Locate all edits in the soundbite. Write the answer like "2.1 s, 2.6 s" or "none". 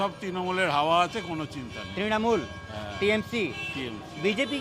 none